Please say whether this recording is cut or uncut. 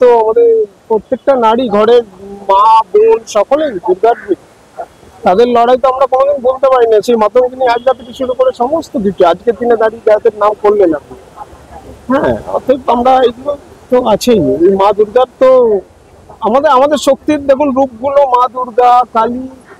uncut